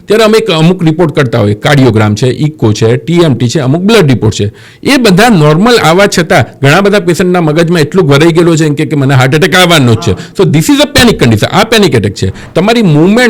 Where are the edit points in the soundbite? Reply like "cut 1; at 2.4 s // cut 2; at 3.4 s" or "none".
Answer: cut 1; at 12.4 s